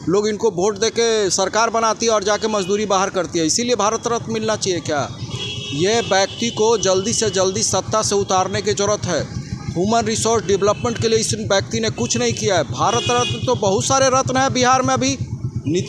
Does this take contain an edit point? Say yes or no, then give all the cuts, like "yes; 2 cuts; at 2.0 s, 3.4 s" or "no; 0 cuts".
no; 0 cuts